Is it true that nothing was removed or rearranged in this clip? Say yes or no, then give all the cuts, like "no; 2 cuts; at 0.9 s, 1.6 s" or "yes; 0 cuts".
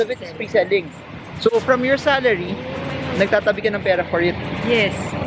yes; 0 cuts